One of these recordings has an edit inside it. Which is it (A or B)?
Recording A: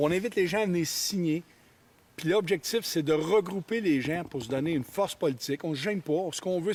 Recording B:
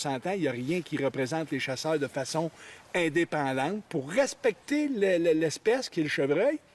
B